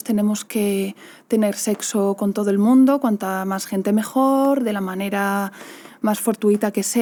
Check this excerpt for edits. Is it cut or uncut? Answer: uncut